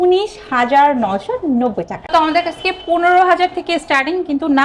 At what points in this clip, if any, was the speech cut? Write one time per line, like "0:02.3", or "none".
none

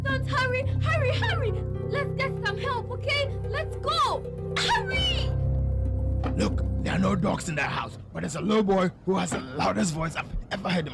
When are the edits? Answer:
none

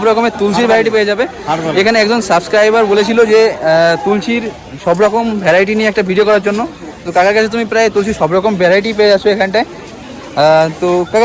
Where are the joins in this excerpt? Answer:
none

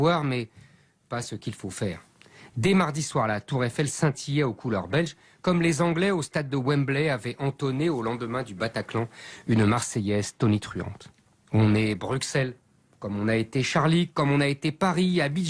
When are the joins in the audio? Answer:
0:07.2

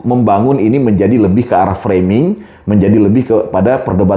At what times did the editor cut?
none

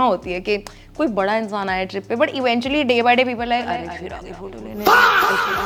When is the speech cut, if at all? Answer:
none

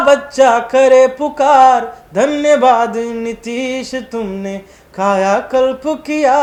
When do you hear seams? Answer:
none

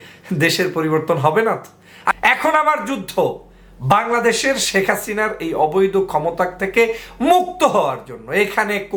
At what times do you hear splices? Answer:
0:02.1

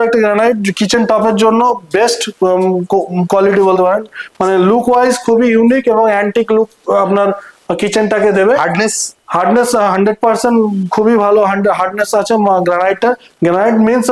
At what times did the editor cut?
none

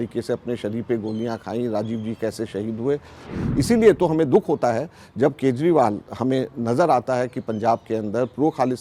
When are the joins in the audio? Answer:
0:03.3

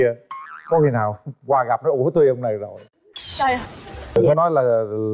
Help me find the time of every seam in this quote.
0:04.2

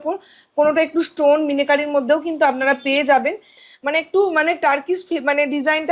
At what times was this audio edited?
0:03.6

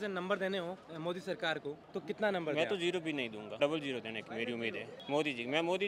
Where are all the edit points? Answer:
0:00.9
0:01.8
0:03.4
0:04.9

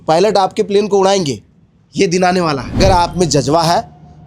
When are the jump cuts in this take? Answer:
0:02.8

